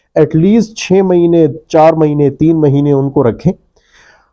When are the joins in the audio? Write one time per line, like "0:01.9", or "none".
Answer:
none